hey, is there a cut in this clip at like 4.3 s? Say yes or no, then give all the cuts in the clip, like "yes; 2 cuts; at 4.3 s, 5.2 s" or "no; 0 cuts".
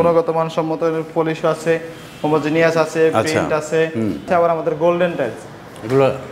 yes; 1 cut; at 4.3 s